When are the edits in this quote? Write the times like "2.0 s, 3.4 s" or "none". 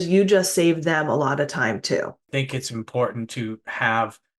2.3 s